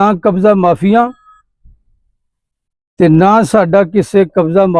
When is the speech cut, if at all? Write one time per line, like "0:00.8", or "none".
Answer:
none